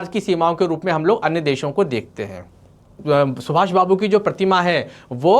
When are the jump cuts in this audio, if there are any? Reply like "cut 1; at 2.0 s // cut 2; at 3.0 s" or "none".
cut 1; at 3.0 s